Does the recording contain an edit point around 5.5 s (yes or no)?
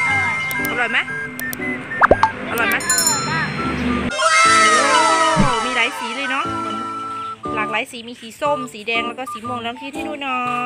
no